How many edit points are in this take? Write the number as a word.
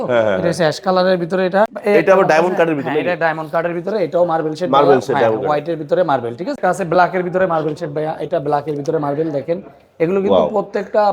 two